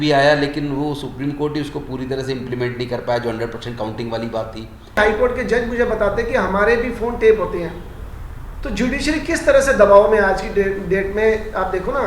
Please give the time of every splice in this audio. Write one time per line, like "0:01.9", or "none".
0:05.0